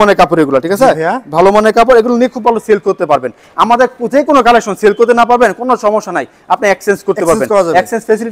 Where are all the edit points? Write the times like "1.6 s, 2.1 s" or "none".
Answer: none